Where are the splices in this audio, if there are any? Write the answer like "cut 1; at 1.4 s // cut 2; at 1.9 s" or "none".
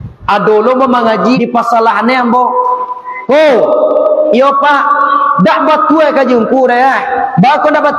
cut 1; at 1.4 s